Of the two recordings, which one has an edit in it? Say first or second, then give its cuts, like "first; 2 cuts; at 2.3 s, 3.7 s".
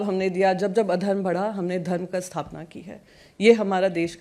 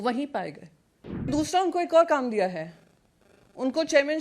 second; 1 cut; at 1.3 s